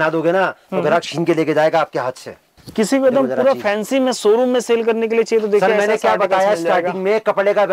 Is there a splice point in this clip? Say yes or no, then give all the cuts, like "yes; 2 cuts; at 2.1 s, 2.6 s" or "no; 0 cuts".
yes; 1 cut; at 2.6 s